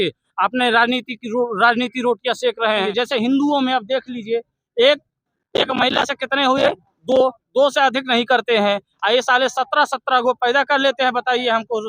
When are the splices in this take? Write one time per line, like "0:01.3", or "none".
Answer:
0:02.9